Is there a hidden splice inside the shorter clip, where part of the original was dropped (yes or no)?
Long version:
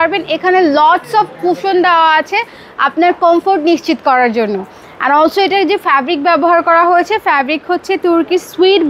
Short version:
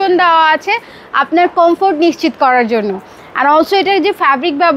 no